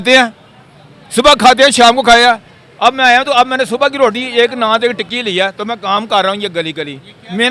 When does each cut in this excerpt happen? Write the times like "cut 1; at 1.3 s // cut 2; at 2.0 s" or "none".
none